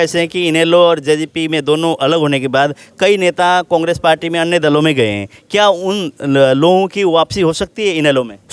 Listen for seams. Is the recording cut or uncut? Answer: uncut